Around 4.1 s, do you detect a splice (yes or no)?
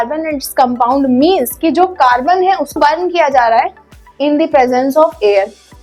no